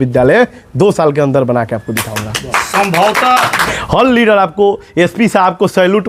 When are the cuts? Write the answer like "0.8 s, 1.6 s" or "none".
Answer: 3.7 s

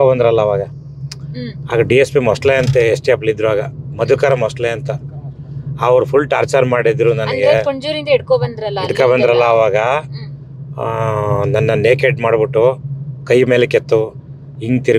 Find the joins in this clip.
none

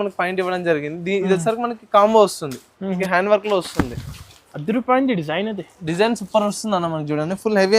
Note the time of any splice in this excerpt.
3.0 s

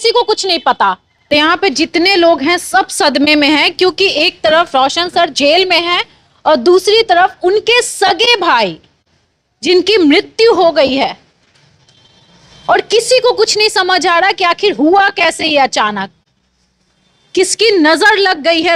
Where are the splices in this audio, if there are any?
1.3 s

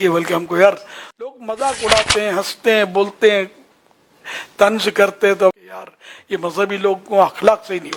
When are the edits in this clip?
1.3 s, 5.5 s

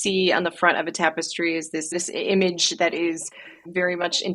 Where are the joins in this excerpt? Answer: 2.0 s

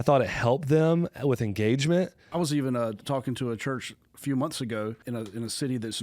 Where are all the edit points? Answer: 2.2 s, 5.0 s

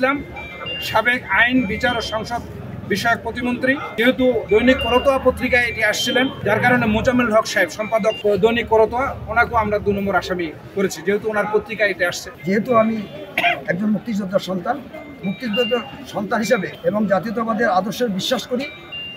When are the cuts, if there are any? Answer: 3.9 s, 6.4 s, 8.2 s, 12.3 s, 16.7 s

